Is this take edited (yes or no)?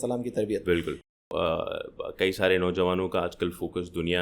yes